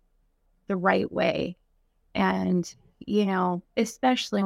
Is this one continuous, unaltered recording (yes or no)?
yes